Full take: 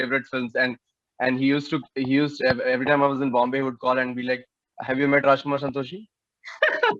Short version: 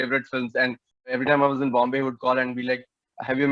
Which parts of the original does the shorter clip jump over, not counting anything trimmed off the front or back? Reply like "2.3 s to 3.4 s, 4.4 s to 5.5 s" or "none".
1.1 s to 2.7 s